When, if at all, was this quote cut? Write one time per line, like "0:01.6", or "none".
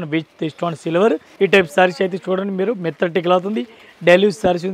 0:01.3